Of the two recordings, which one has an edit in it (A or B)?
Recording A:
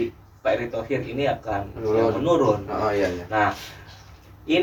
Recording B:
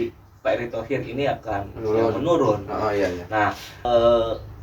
B